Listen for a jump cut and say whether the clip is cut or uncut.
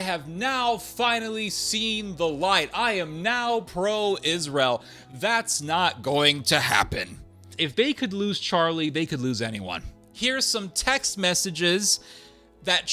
cut